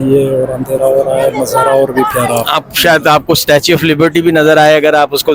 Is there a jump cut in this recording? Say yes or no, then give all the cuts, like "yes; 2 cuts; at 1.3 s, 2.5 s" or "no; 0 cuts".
no; 0 cuts